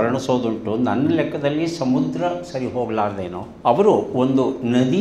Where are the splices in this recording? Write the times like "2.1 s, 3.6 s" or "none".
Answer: 3.4 s

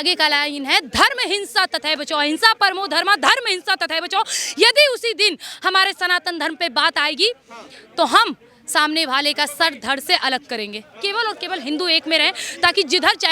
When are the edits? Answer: 10.9 s

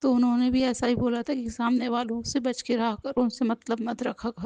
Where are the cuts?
none

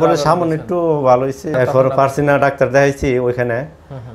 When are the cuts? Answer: 1.5 s

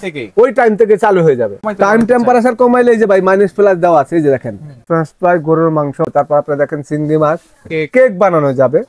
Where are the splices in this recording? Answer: 1.6 s, 4.8 s, 6.1 s

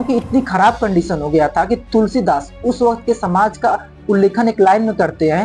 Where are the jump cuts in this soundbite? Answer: none

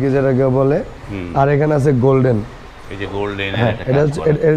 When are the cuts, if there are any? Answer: none

